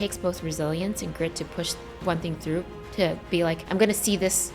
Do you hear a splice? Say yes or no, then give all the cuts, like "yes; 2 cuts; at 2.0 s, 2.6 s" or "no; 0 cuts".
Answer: yes; 1 cut; at 3.6 s